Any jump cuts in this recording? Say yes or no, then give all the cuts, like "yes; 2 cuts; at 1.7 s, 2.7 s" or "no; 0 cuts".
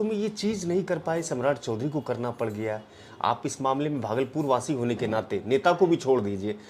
no; 0 cuts